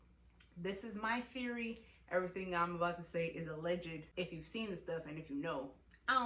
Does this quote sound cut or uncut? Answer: cut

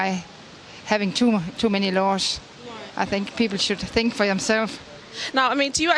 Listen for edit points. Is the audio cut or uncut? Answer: uncut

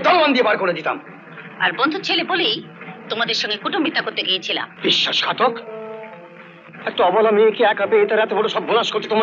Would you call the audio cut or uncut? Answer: cut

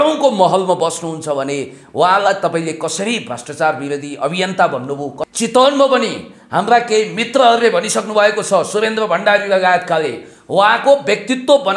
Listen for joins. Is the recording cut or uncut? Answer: cut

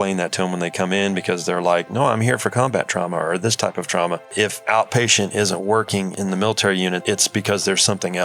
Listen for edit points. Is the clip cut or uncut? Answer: cut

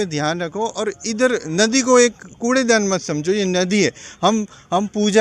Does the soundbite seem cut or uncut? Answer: uncut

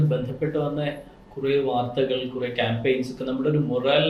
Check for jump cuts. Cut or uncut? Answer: uncut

